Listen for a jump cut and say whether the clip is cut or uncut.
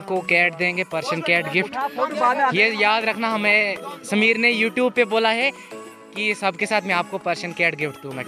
uncut